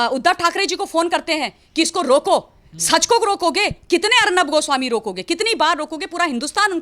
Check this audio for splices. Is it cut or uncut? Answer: uncut